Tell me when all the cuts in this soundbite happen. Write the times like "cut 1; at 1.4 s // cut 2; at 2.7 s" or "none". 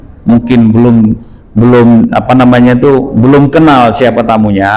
none

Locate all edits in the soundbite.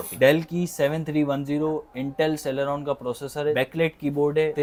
none

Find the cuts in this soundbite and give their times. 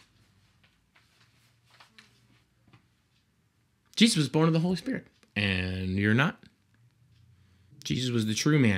cut 1; at 7.9 s

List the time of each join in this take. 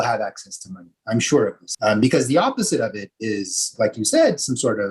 cut 1; at 1.7 s

